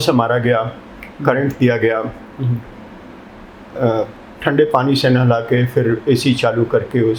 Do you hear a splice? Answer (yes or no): no